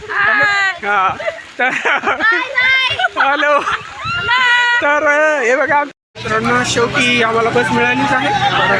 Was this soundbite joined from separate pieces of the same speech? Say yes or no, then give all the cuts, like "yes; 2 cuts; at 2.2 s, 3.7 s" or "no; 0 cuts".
yes; 1 cut; at 6.1 s